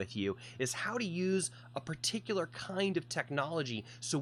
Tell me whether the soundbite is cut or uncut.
uncut